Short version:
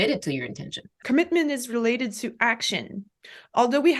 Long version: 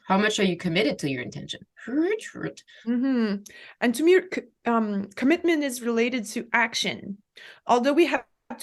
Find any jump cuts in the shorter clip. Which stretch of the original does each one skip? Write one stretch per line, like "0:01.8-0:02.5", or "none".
0:01.7-0:05.1